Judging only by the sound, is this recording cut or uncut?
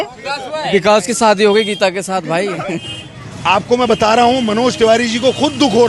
cut